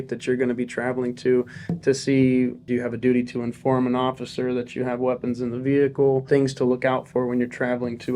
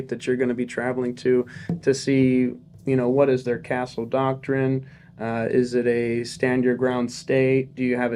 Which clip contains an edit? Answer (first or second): first